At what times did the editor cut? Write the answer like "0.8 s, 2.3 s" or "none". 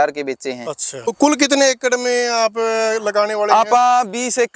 1.1 s